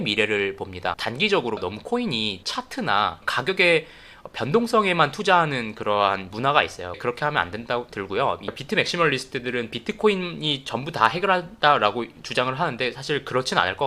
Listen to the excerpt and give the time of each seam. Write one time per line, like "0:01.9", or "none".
0:01.6
0:08.5